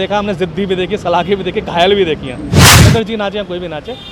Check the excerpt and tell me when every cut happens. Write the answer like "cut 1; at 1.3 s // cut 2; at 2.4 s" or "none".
cut 1; at 2.7 s